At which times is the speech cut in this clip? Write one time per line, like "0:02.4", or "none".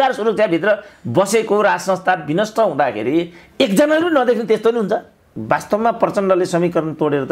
0:05.3